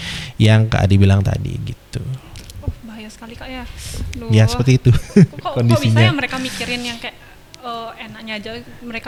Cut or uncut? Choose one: uncut